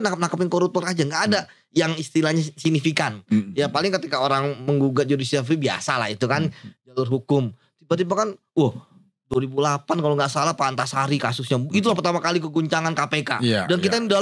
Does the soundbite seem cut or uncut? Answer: uncut